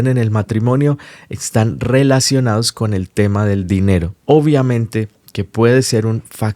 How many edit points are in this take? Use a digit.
1